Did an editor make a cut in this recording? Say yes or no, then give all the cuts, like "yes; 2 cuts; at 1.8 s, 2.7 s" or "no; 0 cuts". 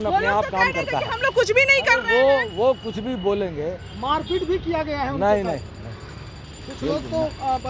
no; 0 cuts